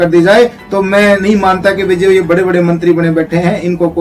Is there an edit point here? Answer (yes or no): no